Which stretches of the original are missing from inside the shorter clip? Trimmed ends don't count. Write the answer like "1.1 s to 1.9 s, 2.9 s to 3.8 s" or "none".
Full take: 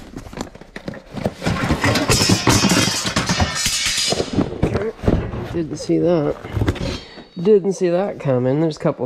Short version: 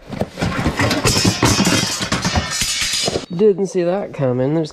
4.3 s to 7.3 s